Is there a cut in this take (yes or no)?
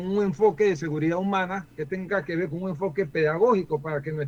no